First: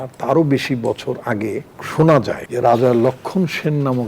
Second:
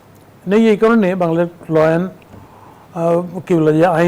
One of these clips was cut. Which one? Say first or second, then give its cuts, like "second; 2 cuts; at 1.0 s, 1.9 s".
first; 2 cuts; at 1.7 s, 2.4 s